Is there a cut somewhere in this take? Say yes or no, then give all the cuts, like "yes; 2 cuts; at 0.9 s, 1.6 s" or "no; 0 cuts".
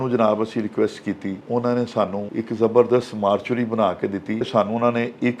yes; 3 cuts; at 1.4 s, 2.3 s, 4.5 s